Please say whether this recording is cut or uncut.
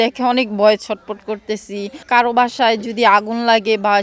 cut